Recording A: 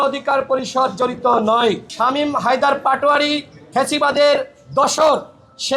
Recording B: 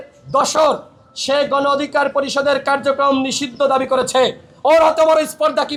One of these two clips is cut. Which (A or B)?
A